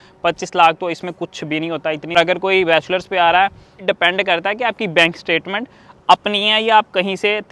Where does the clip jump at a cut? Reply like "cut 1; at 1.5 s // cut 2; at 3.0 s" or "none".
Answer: cut 1; at 2.1 s // cut 2; at 3.8 s